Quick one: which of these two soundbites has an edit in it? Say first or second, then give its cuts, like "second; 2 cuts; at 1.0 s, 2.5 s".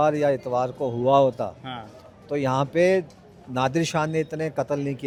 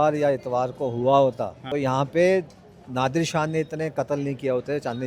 second; 1 cut; at 1.5 s